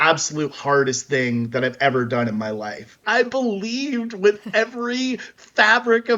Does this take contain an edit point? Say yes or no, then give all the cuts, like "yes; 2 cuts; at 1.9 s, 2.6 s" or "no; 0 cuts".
yes; 1 cut; at 3.0 s